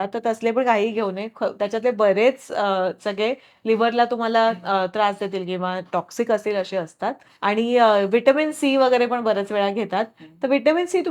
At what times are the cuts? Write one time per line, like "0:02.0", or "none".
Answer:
none